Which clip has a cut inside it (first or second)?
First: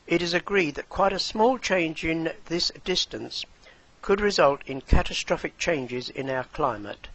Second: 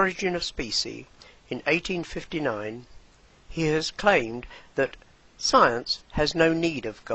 second